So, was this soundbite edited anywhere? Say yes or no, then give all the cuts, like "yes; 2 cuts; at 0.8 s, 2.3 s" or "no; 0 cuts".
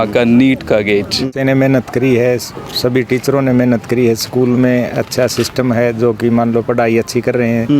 yes; 1 cut; at 1.2 s